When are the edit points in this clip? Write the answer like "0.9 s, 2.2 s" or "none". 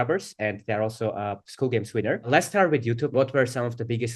2.3 s, 3.1 s